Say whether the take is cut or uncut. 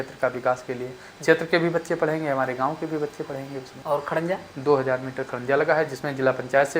cut